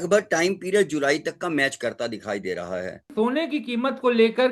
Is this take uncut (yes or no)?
no